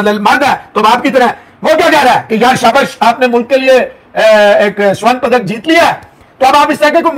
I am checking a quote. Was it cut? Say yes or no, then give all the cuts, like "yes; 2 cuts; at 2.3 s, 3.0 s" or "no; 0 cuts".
no; 0 cuts